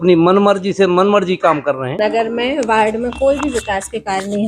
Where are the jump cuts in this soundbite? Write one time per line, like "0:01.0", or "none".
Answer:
0:01.9